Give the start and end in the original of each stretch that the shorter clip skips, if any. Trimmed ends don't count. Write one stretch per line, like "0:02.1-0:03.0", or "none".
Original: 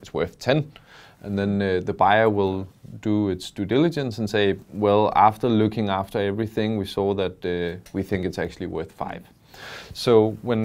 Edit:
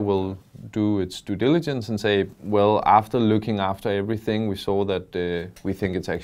none